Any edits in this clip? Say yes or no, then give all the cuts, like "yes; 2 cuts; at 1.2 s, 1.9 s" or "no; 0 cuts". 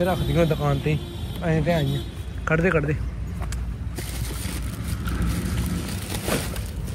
no; 0 cuts